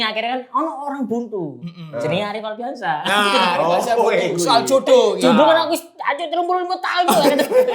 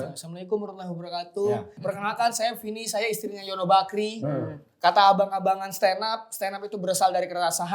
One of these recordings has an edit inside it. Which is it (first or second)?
second